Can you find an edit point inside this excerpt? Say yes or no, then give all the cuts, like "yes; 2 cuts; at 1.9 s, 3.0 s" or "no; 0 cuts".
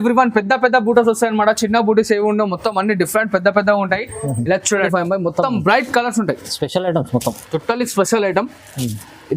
yes; 1 cut; at 4.9 s